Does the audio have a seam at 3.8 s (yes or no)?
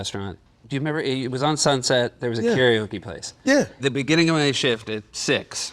yes